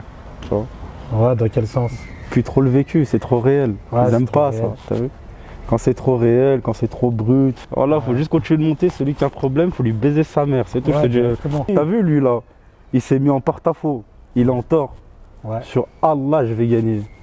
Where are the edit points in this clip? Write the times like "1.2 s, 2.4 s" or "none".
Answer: 7.7 s, 11.7 s

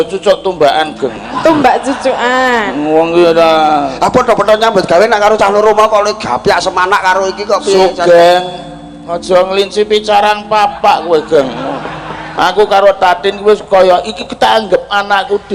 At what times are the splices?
none

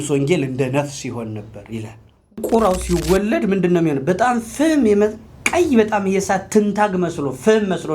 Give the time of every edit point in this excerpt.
2.4 s

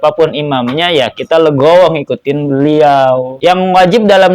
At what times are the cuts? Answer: 3.3 s

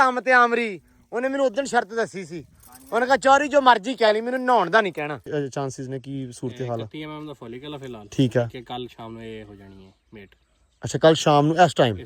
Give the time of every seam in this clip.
5.3 s

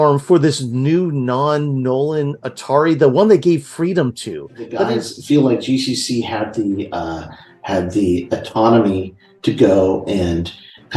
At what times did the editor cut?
5.0 s

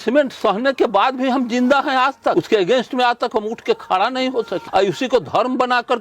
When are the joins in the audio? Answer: 2.3 s, 4.6 s

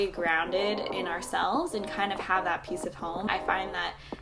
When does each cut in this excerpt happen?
0.9 s, 3.3 s

